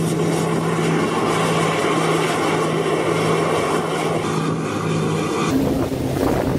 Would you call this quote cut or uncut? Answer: uncut